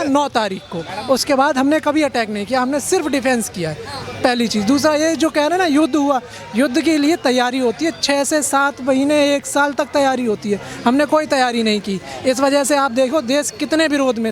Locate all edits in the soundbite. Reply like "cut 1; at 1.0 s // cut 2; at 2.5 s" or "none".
none

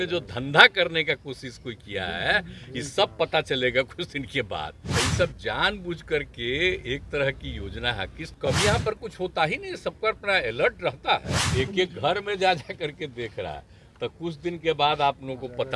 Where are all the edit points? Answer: cut 1; at 4.8 s // cut 2; at 8.2 s // cut 3; at 11.4 s

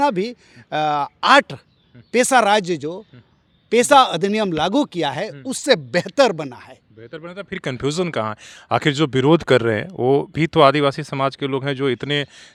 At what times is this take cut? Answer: none

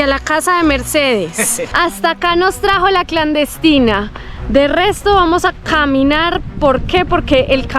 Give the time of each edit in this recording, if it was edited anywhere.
cut 1; at 1.6 s

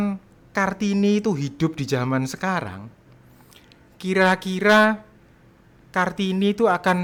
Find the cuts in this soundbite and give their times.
none

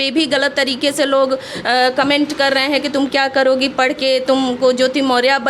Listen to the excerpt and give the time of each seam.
none

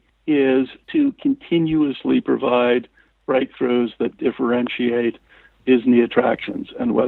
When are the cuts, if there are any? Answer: none

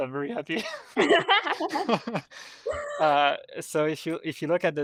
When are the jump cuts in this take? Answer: none

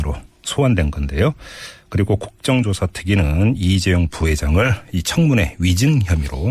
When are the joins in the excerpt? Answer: cut 1; at 1.0 s

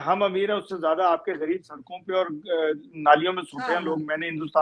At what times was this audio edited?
none

